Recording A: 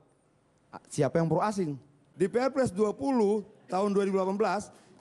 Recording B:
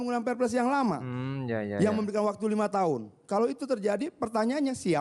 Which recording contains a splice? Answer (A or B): A